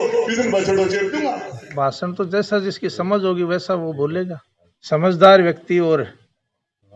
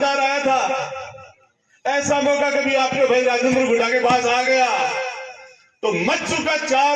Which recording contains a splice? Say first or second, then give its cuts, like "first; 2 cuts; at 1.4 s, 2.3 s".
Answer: first; 2 cuts; at 1.7 s, 4.5 s